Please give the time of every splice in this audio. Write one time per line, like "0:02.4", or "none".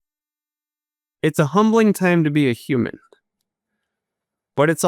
none